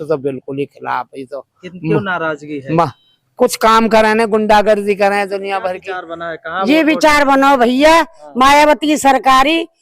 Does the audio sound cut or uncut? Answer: cut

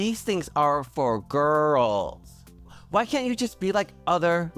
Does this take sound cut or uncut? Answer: cut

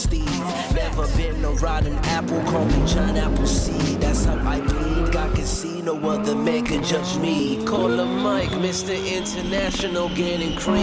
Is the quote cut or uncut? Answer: uncut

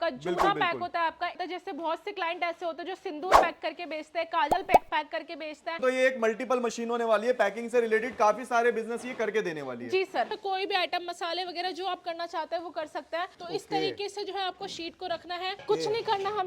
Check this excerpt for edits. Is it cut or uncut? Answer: cut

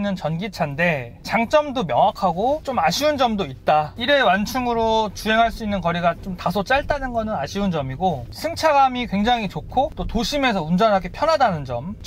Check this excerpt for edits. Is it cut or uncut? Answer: cut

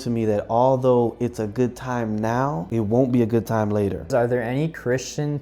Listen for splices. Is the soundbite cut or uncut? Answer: cut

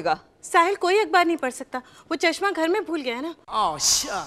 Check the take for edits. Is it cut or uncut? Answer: uncut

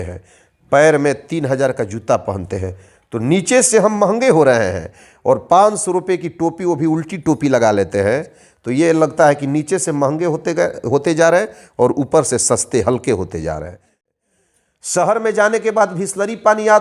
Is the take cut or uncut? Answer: cut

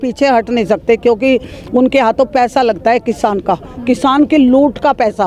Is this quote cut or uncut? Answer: uncut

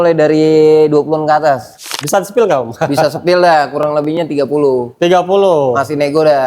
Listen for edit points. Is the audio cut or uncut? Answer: cut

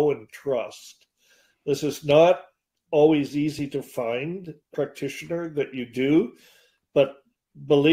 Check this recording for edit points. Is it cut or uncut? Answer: cut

